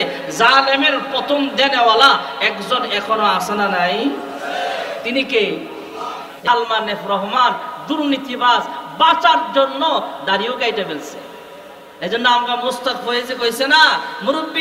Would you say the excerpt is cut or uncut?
cut